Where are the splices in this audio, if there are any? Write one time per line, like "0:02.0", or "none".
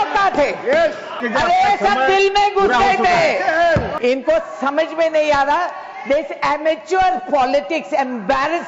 0:01.2
0:03.9